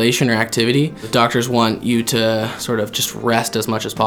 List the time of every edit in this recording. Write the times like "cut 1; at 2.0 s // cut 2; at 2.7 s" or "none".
cut 1; at 1.1 s // cut 2; at 2.6 s